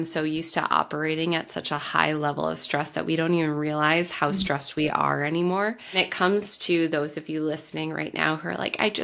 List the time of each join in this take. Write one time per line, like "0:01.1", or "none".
0:06.1